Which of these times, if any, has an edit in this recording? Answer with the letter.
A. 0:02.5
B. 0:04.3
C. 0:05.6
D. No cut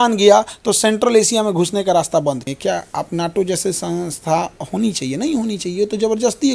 A